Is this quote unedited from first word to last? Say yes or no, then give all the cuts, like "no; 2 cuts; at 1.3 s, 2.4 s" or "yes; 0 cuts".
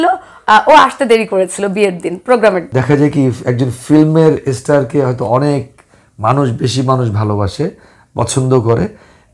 no; 1 cut; at 2.7 s